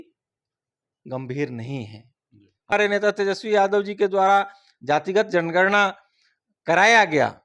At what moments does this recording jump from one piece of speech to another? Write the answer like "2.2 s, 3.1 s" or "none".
2.7 s